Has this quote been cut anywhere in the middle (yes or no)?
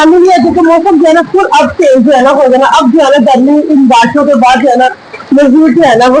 no